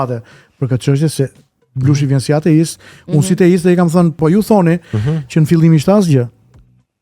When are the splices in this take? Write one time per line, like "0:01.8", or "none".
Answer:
0:04.2